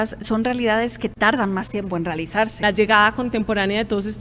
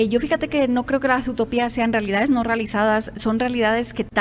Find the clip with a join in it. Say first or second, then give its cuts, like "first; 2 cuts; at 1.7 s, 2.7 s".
first; 1 cut; at 2.6 s